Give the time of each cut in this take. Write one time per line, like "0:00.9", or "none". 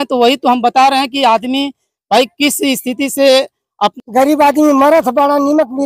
0:03.9